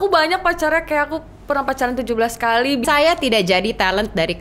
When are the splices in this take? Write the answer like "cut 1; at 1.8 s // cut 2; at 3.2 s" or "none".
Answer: cut 1; at 2.8 s